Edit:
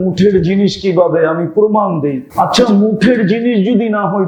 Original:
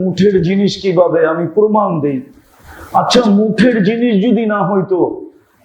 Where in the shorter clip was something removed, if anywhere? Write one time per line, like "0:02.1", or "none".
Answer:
0:02.2